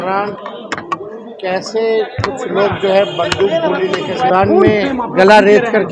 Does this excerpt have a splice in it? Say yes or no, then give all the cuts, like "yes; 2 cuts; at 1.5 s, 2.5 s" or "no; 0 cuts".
yes; 1 cut; at 4.3 s